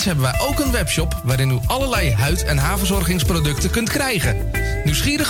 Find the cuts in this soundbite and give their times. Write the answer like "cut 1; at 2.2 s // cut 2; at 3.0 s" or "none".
none